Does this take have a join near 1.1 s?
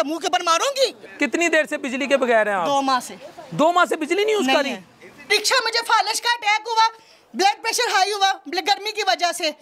yes; 2 cuts; at 1.1 s, 5.3 s

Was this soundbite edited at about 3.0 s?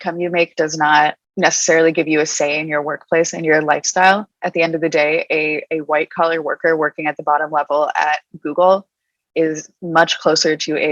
no; 1 cut; at 1.2 s

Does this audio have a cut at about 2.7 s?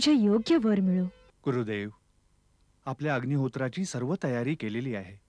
no; 1 cut; at 1.3 s

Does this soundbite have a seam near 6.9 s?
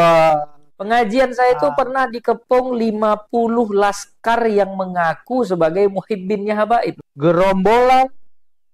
yes; 1 cut; at 6.9 s

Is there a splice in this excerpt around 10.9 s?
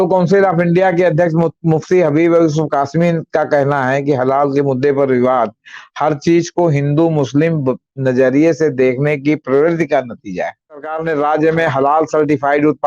yes; 1 cut; at 10.9 s

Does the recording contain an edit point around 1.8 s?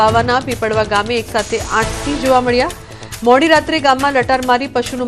no; 0 cuts

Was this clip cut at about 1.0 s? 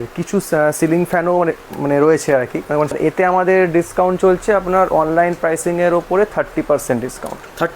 no; 1 cut; at 2.9 s

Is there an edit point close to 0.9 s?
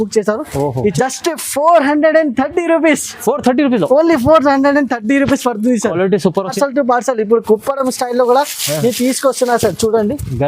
yes; 2 cuts; at 0.9 s, 6.5 s

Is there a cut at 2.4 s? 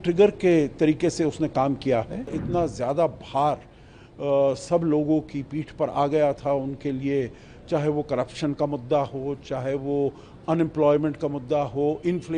yes; 1 cut; at 2.4 s

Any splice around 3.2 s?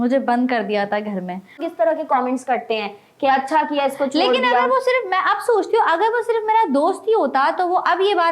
no; 1 cut; at 1.6 s

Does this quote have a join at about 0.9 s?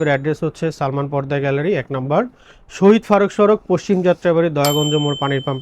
no; 0 cuts

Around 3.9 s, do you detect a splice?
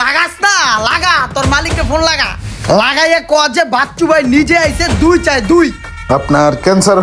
no; 1 cut; at 5.9 s

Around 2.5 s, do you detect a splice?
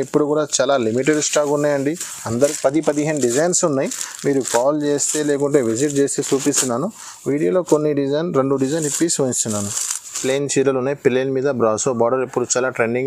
yes; 2 cuts; at 2.5 s, 10.2 s

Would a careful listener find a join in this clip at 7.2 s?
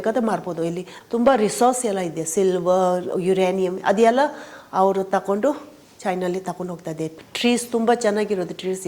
yes; 2 cuts; at 0.9 s, 7.2 s

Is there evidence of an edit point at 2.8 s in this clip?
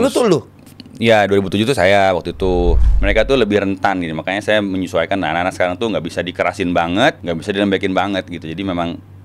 yes; 2 cuts; at 2.8 s, 7.2 s

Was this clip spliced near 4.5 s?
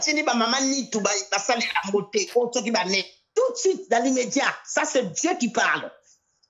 no; 1 cut; at 3.2 s

